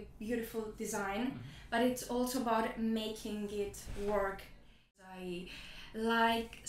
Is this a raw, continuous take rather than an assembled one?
no; 1 cut; at 4.9 s

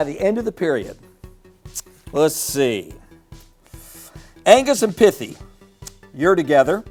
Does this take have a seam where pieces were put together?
no; 0 cuts

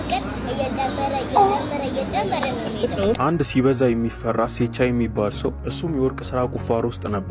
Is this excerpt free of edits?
no; 1 cut; at 3.2 s

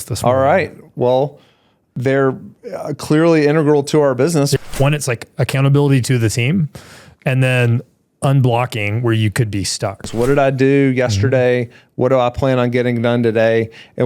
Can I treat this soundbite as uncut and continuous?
no; 2 cuts; at 4.5 s, 10.1 s

